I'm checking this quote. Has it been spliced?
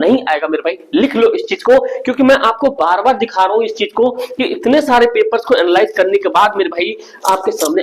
no; 0 cuts

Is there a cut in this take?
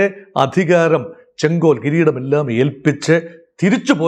no; 0 cuts

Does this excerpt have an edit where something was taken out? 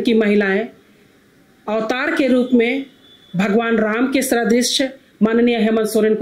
no; 0 cuts

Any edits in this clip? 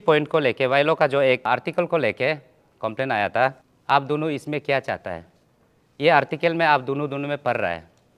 yes; 1 cut; at 3.7 s

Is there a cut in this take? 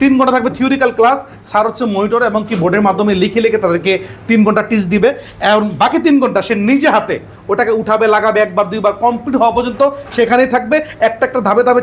no; 0 cuts

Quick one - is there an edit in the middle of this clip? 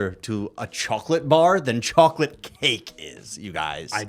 no; 0 cuts

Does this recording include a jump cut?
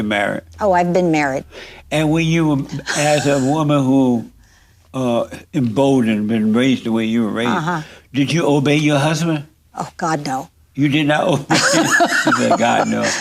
no; 0 cuts

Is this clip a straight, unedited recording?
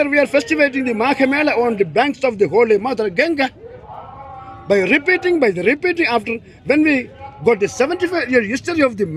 yes; 0 cuts

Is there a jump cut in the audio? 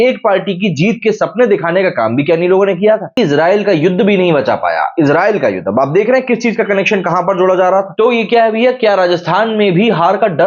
yes; 2 cuts; at 3.2 s, 7.9 s

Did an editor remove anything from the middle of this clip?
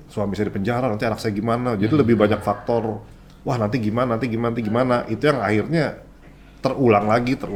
no; 0 cuts

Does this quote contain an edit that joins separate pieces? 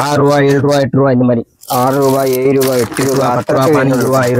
no; 0 cuts

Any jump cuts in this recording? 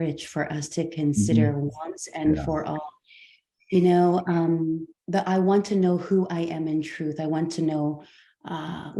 no; 0 cuts

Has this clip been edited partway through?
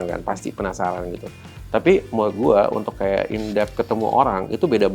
no; 0 cuts

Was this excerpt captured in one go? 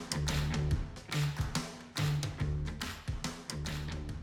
yes; 0 cuts

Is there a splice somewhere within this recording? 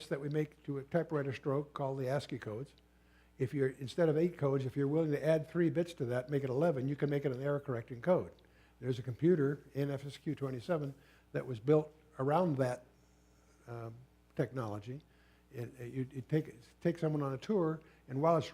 yes; 1 cut; at 14.1 s

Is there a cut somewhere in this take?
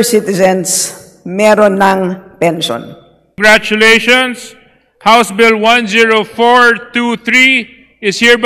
yes; 1 cut; at 3.4 s

